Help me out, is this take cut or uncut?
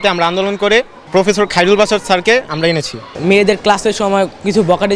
cut